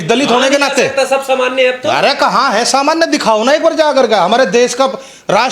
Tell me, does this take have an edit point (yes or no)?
no